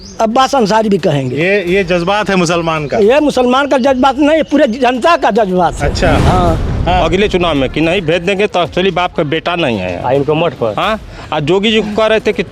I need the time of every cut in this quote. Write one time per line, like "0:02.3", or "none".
0:06.7